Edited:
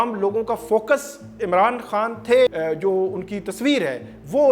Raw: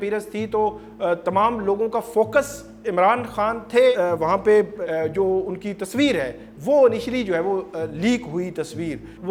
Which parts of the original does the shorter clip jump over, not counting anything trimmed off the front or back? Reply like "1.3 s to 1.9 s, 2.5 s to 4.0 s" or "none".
4.0 s to 4.8 s

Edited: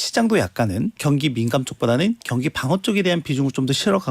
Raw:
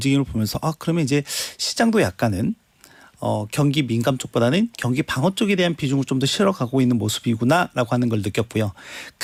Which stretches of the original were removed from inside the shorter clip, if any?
2.6 s to 3.5 s

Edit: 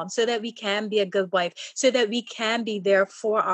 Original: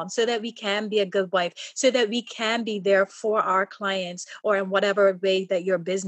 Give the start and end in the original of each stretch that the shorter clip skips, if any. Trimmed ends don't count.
none

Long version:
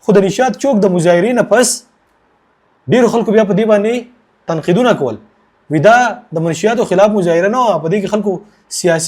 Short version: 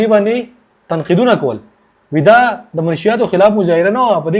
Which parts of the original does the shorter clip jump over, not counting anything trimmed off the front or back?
none

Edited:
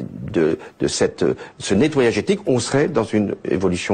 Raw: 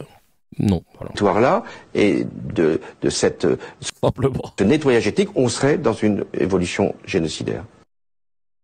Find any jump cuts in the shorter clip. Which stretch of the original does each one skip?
3.8 s to 4.4 s

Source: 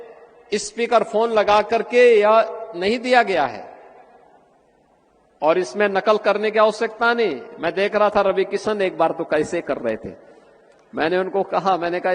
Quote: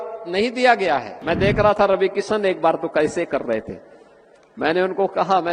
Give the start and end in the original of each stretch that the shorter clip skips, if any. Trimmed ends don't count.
3.6 s to 7.5 s

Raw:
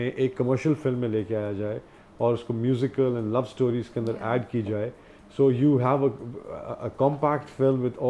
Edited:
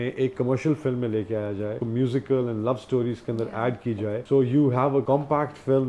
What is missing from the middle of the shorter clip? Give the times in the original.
1.8 s to 2.5 s, 4.9 s to 5.3 s, 6.1 s to 7.0 s

